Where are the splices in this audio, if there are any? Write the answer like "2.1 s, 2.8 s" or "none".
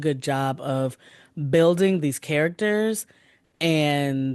none